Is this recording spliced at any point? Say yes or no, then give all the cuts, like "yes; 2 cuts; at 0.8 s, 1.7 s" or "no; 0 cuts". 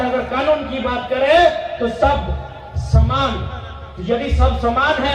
no; 0 cuts